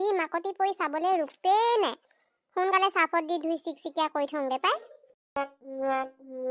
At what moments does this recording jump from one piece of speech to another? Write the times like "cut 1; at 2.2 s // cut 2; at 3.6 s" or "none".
cut 1; at 5.4 s